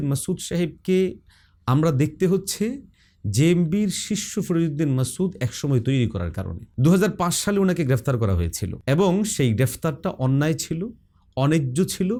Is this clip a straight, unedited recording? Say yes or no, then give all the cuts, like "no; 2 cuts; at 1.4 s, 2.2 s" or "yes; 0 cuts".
yes; 0 cuts